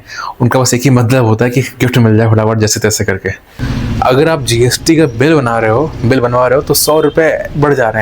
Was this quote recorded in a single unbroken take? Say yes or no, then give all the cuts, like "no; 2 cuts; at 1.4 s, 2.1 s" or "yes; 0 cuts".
no; 1 cut; at 3.7 s